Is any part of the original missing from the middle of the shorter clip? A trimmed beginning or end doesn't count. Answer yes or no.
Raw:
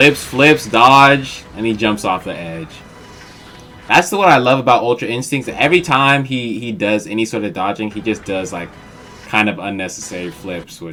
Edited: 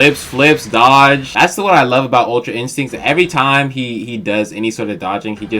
yes